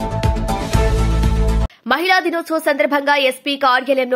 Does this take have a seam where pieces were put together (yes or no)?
yes